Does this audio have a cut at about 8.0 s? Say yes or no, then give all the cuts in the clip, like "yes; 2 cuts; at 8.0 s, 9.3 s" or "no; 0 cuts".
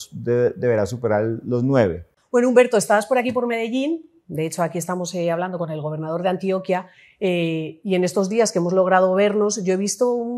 no; 1 cut; at 2.1 s